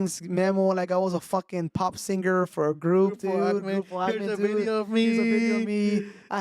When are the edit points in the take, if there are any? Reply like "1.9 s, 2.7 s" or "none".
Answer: none